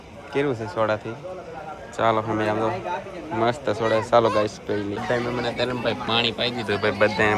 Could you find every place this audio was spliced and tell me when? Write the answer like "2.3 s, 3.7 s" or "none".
5.0 s